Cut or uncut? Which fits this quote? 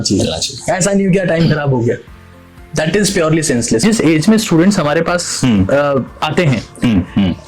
cut